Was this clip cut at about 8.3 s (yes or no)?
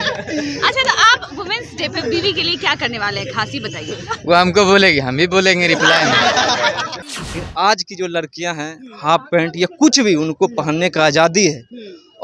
no